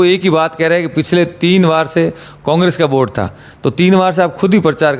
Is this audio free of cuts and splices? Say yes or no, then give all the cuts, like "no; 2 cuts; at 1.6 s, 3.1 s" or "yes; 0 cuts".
yes; 0 cuts